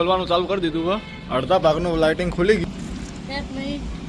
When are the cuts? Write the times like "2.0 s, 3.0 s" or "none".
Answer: none